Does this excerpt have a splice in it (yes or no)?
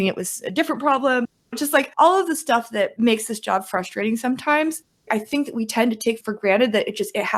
no